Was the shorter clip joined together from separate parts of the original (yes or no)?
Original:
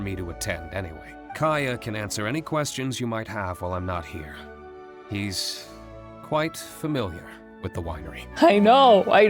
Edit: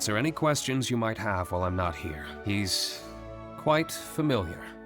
yes